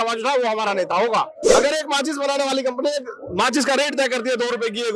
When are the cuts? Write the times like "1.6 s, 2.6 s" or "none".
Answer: 1.6 s